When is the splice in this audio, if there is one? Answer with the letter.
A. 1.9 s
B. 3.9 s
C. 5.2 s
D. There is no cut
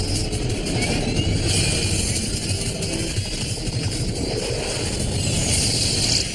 B